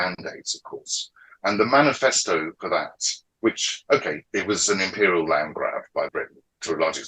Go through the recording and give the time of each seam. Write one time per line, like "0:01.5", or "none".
0:06.0